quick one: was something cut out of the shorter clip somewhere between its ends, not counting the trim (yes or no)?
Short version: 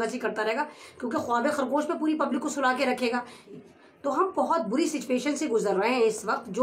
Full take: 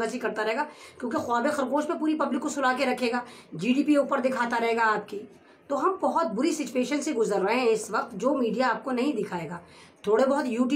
yes